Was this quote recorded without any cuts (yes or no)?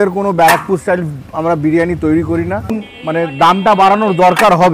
no